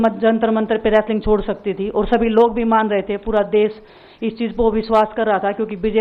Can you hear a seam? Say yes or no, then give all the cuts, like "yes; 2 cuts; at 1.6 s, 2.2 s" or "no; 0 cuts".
no; 0 cuts